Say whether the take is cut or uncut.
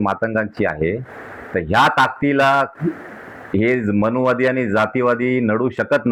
uncut